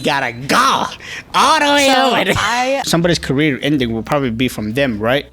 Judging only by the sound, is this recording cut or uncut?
cut